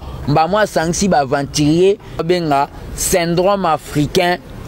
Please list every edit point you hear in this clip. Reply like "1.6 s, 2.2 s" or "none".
2.2 s